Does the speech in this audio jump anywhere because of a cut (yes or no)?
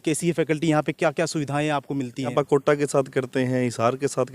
yes